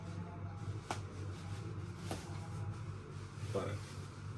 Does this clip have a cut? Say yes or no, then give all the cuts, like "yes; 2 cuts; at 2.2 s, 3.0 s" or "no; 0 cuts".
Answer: no; 0 cuts